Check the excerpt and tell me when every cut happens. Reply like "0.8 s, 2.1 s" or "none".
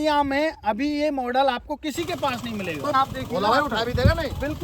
2.9 s